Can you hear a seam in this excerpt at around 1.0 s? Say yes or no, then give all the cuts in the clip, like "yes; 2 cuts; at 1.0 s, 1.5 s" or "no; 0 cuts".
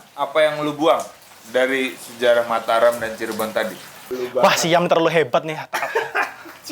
no; 1 cut; at 4.2 s